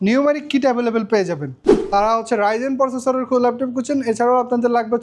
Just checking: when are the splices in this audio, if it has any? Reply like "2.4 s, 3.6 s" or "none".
1.7 s